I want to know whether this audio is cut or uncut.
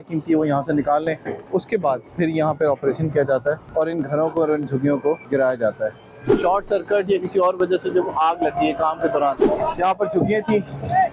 cut